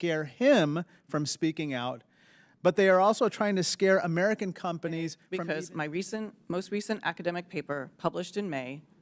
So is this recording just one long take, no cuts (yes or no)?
no